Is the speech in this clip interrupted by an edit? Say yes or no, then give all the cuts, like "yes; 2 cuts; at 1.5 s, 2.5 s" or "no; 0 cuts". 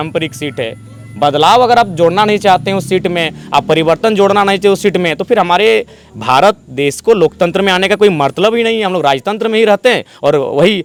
no; 0 cuts